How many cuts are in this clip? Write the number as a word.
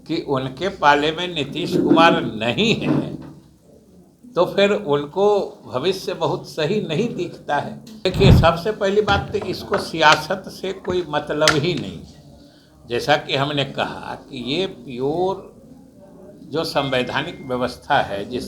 one